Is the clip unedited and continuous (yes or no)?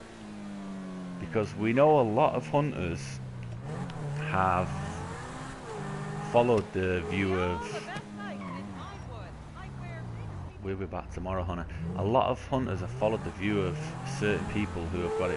yes